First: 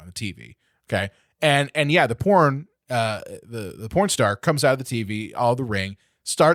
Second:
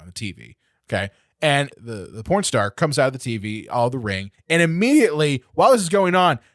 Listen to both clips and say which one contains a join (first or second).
second